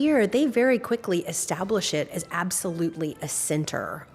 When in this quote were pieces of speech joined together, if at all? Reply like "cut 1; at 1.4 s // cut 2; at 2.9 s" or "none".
none